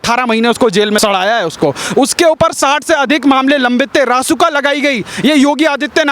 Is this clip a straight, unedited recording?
yes; 0 cuts

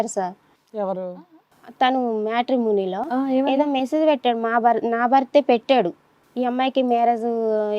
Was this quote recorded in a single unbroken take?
no; 1 cut; at 6.2 s

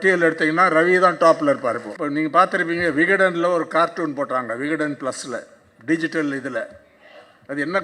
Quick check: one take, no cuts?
no; 1 cut; at 1.9 s

